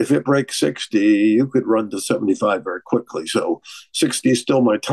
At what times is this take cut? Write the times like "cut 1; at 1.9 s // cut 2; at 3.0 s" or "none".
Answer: none